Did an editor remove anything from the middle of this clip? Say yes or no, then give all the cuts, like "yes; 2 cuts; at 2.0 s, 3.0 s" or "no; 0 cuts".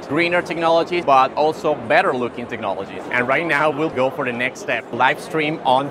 yes; 2 cuts; at 1.0 s, 3.0 s